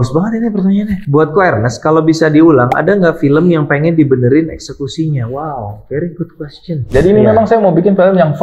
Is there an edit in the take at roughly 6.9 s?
yes; 2 cuts; at 1.0 s, 6.9 s

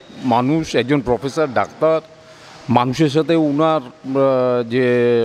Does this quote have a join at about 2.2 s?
no; 0 cuts

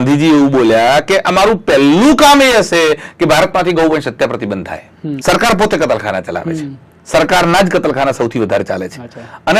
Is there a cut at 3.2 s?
no; 1 cut; at 5.1 s

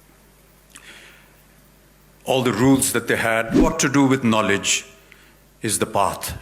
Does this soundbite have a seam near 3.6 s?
yes; 1 cut; at 3.6 s

